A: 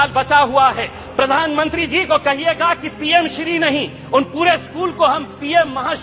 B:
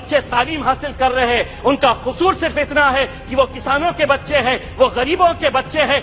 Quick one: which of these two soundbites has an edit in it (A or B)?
A